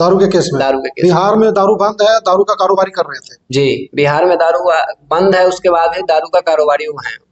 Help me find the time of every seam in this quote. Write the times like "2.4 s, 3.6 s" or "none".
none